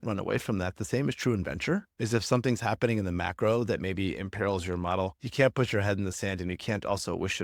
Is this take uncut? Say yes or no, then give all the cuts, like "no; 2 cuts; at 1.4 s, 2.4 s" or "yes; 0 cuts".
yes; 0 cuts